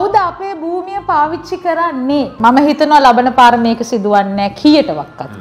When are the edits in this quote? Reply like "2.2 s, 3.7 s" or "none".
2.3 s